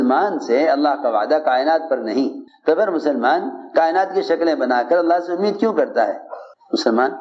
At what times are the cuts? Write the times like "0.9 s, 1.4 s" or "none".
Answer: none